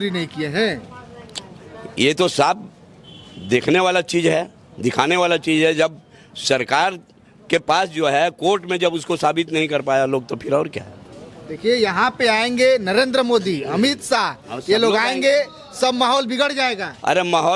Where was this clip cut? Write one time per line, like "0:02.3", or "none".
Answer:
none